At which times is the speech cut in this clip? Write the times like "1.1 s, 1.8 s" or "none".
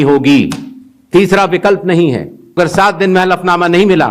2.6 s